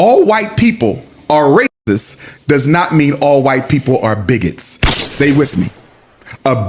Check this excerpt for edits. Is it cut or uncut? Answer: uncut